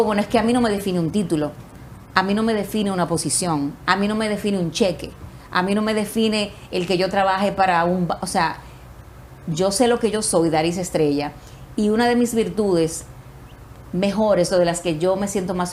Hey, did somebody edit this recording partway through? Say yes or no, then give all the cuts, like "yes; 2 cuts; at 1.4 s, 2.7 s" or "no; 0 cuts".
no; 0 cuts